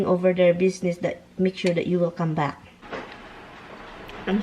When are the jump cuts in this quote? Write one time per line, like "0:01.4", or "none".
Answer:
0:02.8